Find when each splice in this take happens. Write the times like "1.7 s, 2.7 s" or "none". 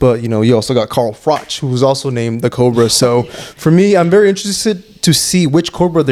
none